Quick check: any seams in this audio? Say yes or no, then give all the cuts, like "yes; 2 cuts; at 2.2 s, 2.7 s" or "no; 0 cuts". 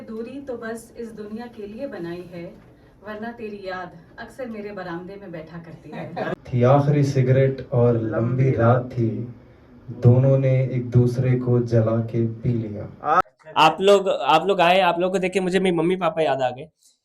yes; 2 cuts; at 6.4 s, 13.2 s